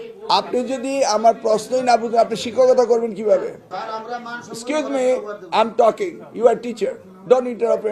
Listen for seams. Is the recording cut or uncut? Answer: cut